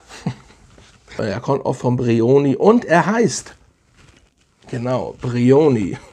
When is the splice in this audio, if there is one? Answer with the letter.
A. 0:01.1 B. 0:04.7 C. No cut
A